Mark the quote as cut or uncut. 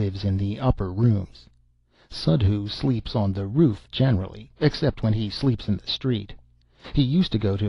uncut